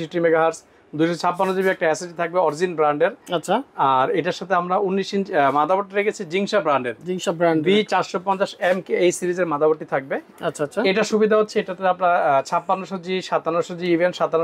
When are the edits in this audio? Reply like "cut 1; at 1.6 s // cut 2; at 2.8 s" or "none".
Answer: none